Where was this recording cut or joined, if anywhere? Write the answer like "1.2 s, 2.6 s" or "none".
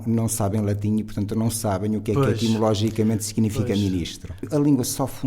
4.3 s